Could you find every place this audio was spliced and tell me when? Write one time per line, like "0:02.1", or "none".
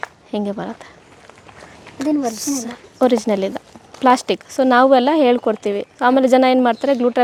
none